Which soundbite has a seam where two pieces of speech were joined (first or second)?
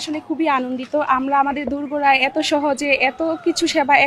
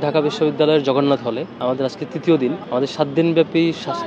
second